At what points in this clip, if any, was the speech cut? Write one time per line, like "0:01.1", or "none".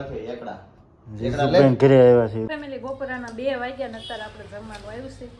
0:02.4